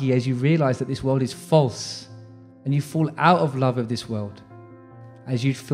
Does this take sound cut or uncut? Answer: uncut